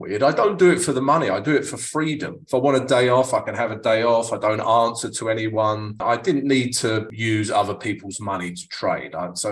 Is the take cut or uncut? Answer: cut